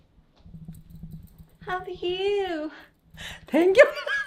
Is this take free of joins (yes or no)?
yes